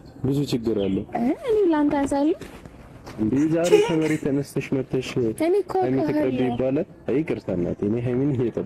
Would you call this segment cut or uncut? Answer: uncut